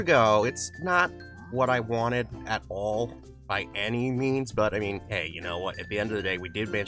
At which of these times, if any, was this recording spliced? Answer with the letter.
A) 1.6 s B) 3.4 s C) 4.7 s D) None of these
D